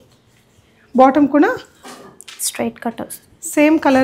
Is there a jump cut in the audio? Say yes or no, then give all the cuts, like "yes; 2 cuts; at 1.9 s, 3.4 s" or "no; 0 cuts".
no; 0 cuts